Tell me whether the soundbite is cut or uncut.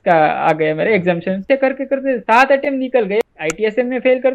cut